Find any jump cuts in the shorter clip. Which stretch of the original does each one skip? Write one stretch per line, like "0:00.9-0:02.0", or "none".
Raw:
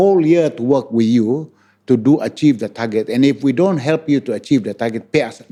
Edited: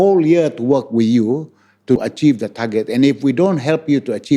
0:02.0-0:02.2